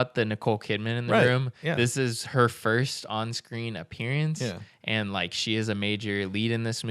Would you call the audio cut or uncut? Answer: uncut